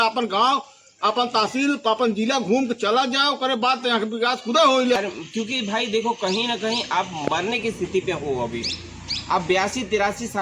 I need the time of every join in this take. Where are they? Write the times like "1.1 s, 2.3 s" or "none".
5.0 s